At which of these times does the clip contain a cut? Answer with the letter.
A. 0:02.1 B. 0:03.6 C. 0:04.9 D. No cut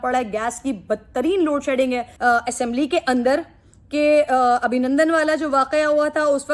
A